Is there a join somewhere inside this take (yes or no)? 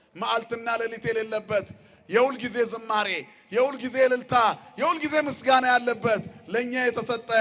no